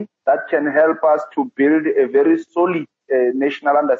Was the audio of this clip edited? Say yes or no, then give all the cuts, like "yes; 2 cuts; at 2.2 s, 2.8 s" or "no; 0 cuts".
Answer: yes; 1 cut; at 3.0 s